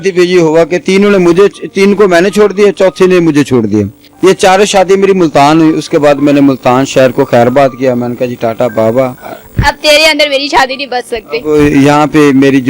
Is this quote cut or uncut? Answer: cut